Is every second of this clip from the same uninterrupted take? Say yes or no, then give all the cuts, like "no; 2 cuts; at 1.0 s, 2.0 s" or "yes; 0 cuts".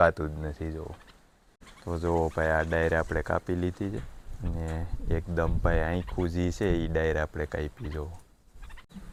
yes; 0 cuts